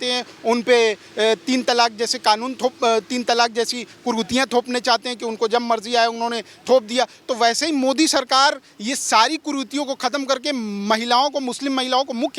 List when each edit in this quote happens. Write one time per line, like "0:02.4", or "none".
none